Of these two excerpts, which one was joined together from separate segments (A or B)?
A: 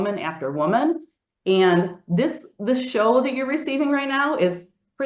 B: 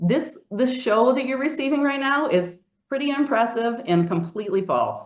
A